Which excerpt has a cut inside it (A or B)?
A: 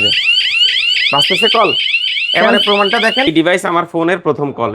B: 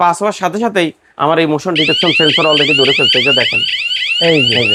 A